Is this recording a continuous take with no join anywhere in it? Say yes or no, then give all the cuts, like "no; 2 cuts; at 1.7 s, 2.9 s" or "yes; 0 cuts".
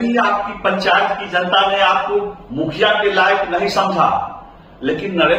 yes; 0 cuts